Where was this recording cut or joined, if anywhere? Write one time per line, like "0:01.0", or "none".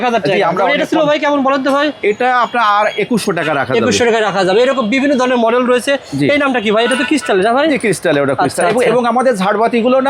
none